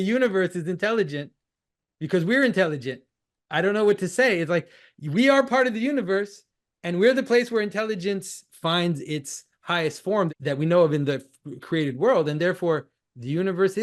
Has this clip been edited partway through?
yes; 2 cuts; at 8.4 s, 10.3 s

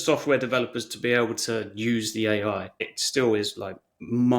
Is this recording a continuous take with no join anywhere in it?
no; 1 cut; at 2.8 s

